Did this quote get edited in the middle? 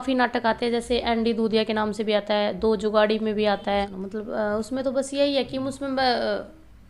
yes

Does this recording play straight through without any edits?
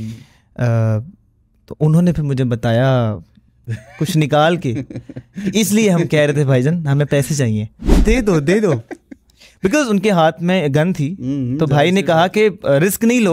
no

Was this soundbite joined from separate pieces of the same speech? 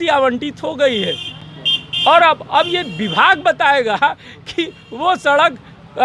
no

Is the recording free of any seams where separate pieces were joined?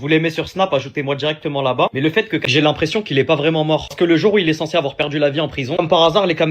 no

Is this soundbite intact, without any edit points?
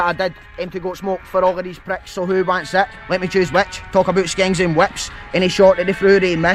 yes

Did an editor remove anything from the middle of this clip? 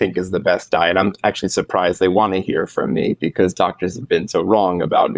no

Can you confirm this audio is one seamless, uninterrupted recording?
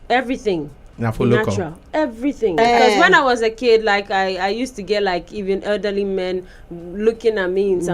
no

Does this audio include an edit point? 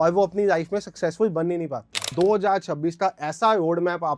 yes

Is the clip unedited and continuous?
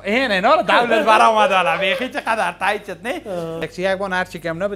no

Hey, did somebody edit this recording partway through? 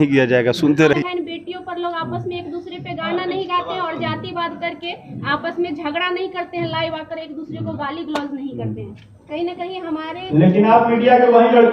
yes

